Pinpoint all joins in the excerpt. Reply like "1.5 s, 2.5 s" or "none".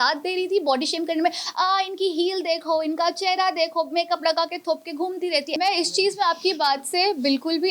5.6 s